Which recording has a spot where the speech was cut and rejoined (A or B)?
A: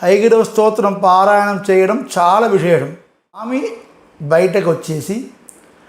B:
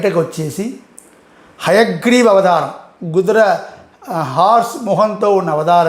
A